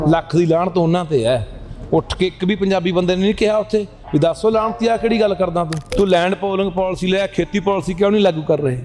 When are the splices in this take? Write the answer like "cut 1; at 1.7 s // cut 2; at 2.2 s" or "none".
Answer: cut 1; at 5.8 s